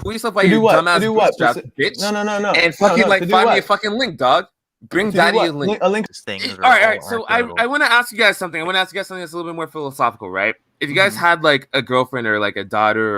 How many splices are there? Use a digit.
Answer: 1